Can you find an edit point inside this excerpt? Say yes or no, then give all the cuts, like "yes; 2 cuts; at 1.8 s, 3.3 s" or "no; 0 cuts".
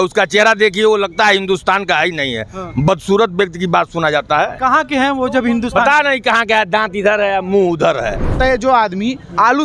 yes; 1 cut; at 8.4 s